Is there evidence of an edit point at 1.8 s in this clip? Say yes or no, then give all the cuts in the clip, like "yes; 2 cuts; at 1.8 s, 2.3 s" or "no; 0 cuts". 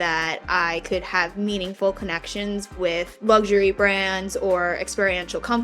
no; 1 cut; at 3.1 s